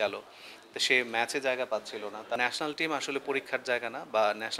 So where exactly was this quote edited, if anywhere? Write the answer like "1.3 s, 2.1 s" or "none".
2.4 s